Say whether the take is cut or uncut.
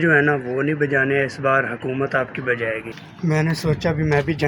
cut